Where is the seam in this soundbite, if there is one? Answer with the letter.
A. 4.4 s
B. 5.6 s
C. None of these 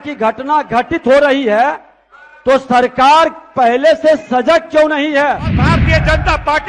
B